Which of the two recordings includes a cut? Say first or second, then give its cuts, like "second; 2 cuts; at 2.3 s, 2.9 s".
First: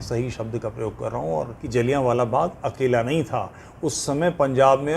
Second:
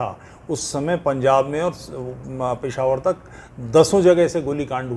first; 1 cut; at 1.6 s